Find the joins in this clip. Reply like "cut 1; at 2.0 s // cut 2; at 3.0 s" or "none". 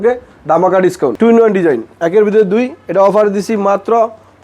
cut 1; at 1.1 s